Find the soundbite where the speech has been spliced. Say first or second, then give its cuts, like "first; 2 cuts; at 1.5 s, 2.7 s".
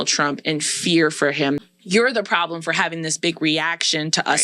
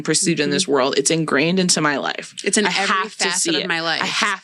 first; 1 cut; at 1.6 s